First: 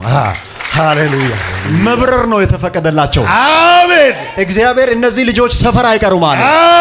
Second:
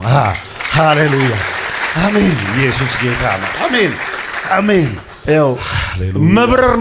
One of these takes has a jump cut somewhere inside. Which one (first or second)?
first